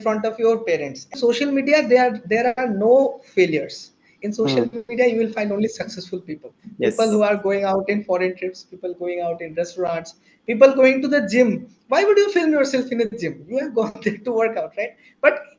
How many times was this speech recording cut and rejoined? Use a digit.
1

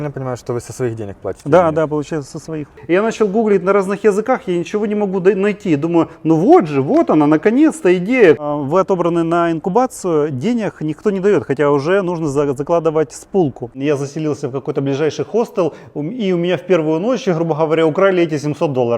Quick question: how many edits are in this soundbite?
3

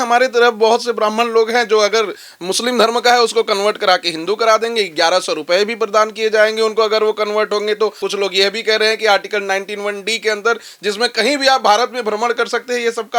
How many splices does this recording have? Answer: 1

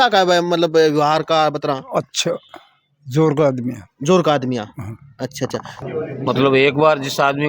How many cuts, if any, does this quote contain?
1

